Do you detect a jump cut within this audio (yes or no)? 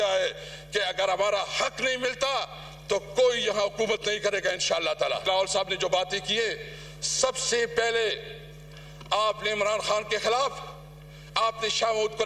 yes